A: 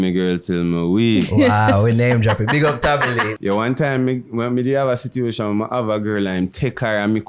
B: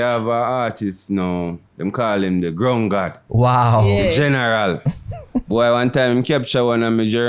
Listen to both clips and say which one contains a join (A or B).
A